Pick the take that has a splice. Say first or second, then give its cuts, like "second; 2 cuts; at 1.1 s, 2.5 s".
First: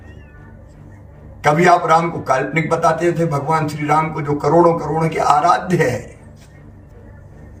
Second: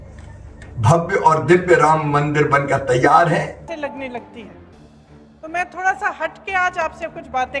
second; 1 cut; at 3.7 s